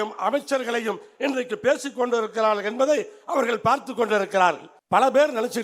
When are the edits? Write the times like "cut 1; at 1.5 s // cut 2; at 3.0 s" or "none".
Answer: cut 1; at 4.7 s